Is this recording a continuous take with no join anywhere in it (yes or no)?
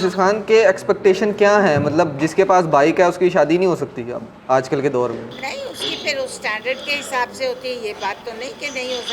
yes